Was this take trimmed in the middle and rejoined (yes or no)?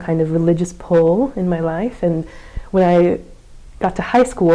no